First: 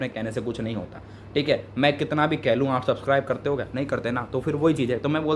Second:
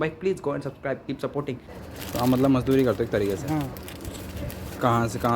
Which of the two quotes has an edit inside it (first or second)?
second